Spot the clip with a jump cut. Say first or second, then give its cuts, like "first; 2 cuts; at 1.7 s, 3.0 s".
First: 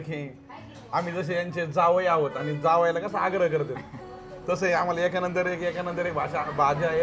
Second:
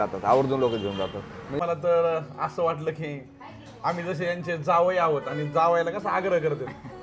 second; 1 cut; at 1.5 s